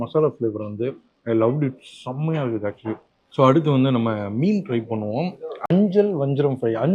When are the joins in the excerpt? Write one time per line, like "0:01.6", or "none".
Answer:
none